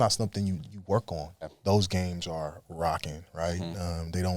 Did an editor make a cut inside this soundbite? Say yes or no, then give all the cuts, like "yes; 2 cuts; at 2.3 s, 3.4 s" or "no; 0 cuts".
yes; 1 cut; at 1.5 s